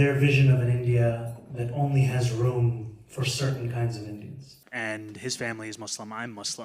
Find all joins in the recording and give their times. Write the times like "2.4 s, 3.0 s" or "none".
4.6 s

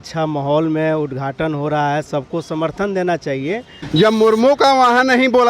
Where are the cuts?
3.8 s

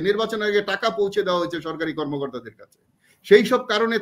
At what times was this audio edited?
none

